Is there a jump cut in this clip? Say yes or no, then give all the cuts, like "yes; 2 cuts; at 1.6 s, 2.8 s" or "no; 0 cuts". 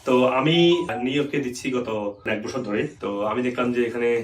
yes; 2 cuts; at 0.9 s, 2.5 s